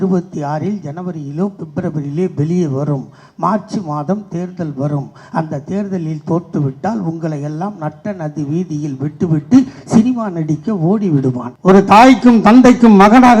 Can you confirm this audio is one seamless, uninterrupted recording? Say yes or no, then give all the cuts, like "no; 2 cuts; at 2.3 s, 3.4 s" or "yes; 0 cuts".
no; 1 cut; at 11.5 s